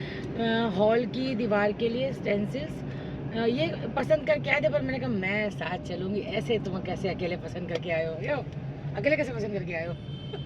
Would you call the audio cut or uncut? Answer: uncut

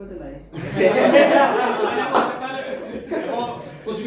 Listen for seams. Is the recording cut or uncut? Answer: uncut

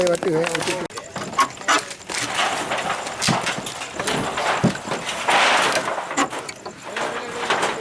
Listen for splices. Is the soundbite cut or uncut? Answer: cut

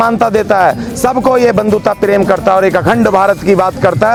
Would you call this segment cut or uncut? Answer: uncut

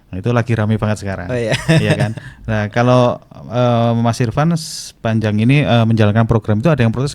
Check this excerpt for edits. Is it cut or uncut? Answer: uncut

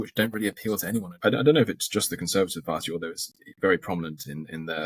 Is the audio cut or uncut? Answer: cut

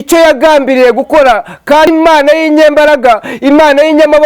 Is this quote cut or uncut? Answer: cut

